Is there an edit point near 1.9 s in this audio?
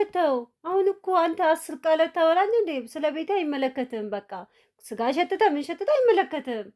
no; 0 cuts

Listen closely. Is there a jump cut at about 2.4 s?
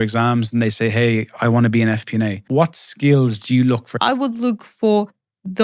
yes; 2 cuts; at 2.4 s, 4.1 s

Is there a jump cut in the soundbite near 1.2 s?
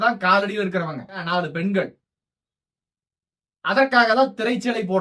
yes; 1 cut; at 1.2 s

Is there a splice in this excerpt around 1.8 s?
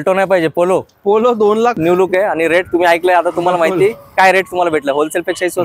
yes; 1 cut; at 1.8 s

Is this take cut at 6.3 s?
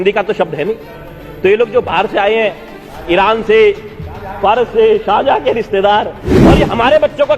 yes; 1 cut; at 6.3 s

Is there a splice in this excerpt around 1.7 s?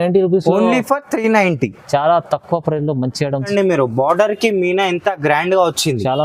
no; 1 cut; at 3.5 s

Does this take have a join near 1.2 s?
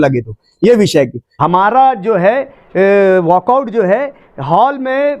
yes; 1 cut; at 1.2 s

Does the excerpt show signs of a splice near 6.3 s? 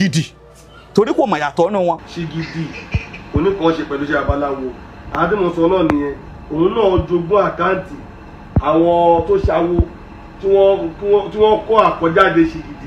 no; 1 cut; at 2.0 s

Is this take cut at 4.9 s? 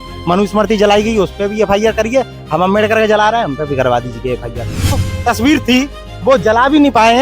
yes; 1 cut; at 4.9 s

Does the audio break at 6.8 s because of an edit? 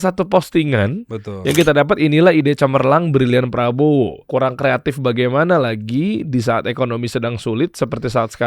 no; 1 cut; at 4.2 s

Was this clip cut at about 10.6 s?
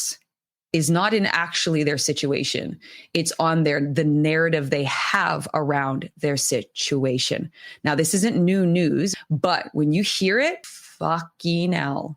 yes; 2 cuts; at 9.1 s, 10.6 s

